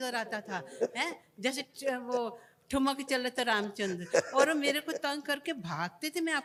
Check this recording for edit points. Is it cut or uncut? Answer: uncut